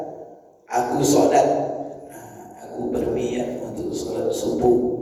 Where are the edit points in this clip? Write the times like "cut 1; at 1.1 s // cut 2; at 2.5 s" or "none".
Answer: none